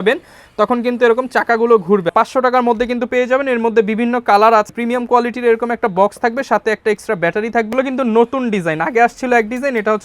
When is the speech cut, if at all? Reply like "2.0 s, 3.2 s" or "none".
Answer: 2.1 s, 4.7 s, 7.7 s